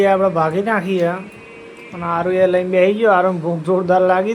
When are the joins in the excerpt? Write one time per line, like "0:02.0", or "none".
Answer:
none